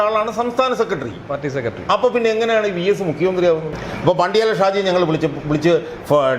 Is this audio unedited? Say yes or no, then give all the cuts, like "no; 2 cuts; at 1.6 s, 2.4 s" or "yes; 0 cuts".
no; 1 cut; at 3.8 s